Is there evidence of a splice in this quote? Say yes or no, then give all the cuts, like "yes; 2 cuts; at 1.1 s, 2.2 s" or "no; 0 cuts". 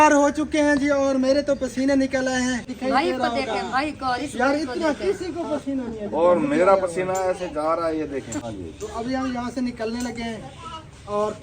yes; 2 cuts; at 2.7 s, 8.5 s